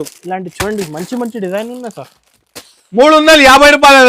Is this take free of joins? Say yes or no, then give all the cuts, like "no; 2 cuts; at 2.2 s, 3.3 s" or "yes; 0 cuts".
yes; 0 cuts